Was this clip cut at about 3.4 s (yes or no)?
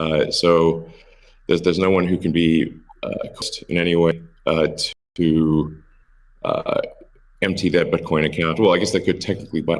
yes